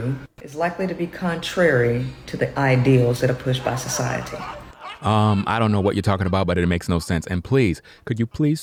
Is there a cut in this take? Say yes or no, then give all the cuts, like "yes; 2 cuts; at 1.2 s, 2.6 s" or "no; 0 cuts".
no; 0 cuts